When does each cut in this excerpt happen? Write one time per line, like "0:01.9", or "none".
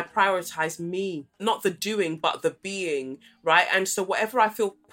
0:01.4